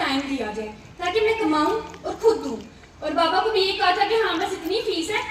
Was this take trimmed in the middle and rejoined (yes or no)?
no